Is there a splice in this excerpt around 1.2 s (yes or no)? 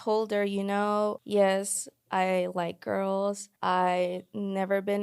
yes